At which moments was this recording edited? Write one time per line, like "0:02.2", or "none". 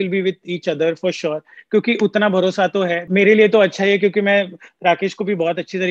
0:03.0